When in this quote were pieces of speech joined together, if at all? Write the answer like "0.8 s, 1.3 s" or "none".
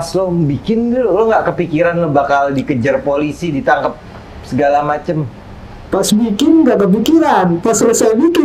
none